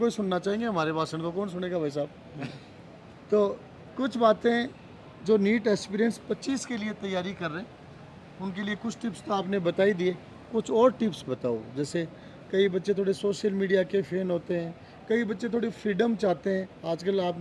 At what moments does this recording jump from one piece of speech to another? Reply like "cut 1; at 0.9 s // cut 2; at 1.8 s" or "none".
none

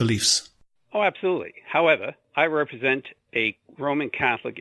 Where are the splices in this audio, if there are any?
cut 1; at 2.2 s

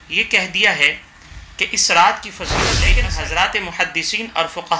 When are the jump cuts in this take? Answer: cut 1; at 2.8 s

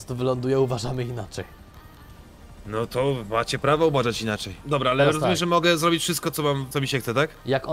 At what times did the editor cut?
cut 1; at 2.5 s // cut 2; at 4.5 s // cut 3; at 6.7 s

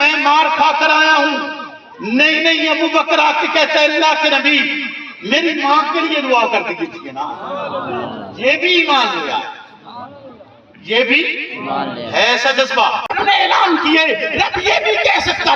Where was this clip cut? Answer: cut 1; at 13.1 s

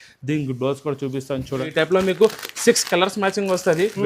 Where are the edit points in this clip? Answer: cut 1; at 1.7 s

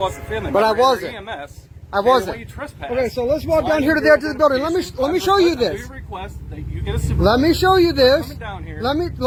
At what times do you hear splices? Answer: none

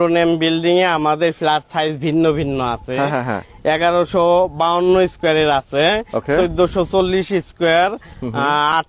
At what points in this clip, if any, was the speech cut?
none

